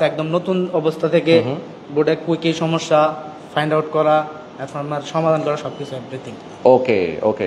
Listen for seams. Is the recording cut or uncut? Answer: uncut